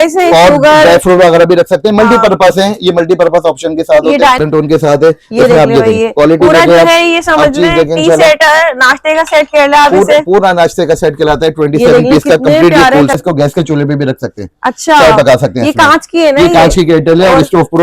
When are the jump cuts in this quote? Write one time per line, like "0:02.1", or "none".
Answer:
0:04.4
0:13.1

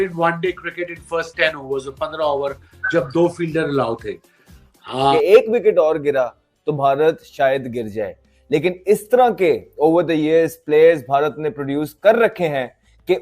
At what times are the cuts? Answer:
0:05.1

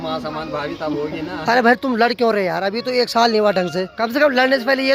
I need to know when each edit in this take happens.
0:03.9

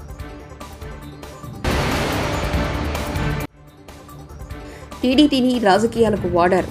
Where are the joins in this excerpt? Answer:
0:01.0

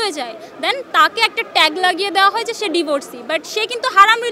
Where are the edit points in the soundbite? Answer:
none

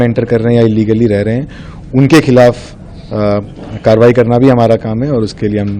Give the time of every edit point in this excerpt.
none

